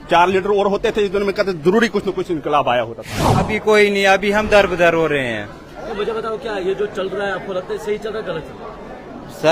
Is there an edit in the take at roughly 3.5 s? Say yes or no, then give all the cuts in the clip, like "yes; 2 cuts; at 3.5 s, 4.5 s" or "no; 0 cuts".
yes; 1 cut; at 3.5 s